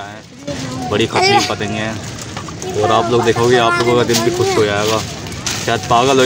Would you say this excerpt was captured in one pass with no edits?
yes; 0 cuts

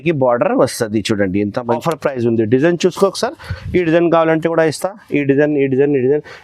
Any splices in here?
yes; 1 cut; at 1.8 s

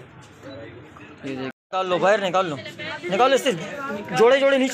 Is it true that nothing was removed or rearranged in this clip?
no; 1 cut; at 1.5 s

